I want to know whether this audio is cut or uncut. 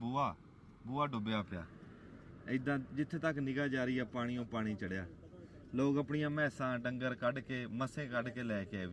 uncut